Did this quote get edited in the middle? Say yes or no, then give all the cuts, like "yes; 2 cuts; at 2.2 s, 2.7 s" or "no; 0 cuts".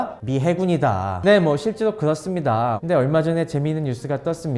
yes; 2 cuts; at 1.1 s, 2.8 s